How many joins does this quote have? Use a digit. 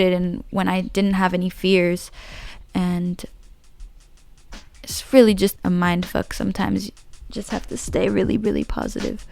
1